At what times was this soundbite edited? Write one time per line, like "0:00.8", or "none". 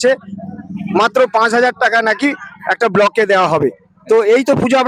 none

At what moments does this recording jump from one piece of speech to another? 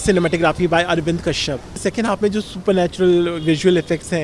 0:01.7

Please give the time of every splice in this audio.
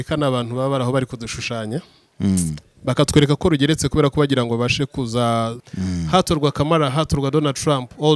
0:05.6

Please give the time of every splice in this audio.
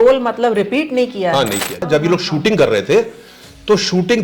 0:01.8

